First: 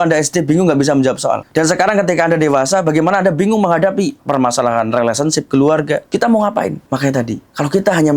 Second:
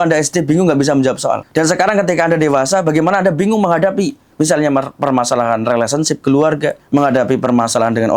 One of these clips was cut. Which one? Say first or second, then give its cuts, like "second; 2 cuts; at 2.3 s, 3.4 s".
first; 2 cuts; at 4.2 s, 6.1 s